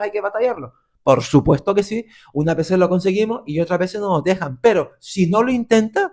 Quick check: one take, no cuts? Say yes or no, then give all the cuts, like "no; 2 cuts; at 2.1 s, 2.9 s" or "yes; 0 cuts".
yes; 0 cuts